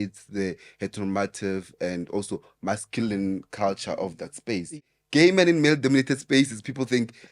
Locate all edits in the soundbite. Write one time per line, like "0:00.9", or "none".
0:04.9